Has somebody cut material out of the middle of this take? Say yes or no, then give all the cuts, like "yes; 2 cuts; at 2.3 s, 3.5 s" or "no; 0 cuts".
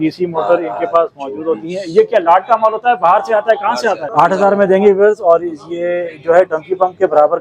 yes; 1 cut; at 4.1 s